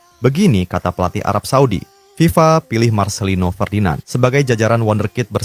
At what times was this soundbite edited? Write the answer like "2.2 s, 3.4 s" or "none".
2.0 s, 4.1 s